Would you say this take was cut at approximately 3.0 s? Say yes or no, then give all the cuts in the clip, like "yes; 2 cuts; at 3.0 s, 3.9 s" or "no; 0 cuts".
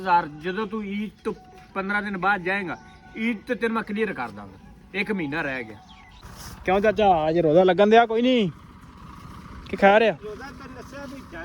no; 1 cut; at 6.2 s